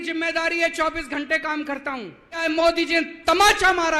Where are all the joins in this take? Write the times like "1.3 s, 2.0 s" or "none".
2.4 s